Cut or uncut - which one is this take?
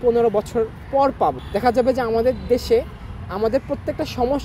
cut